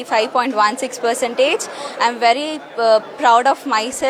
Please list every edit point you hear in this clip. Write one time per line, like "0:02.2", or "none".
none